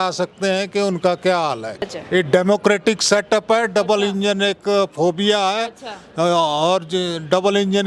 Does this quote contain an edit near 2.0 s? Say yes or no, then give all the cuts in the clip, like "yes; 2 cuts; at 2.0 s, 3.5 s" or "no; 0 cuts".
yes; 1 cut; at 2.0 s